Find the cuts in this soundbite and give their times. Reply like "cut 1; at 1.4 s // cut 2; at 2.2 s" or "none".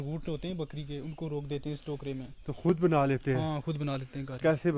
none